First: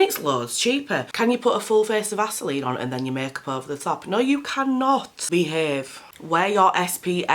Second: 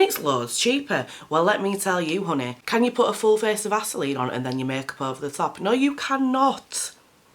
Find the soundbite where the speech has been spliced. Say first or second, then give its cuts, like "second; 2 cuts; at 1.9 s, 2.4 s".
first; 2 cuts; at 1.1 s, 5.1 s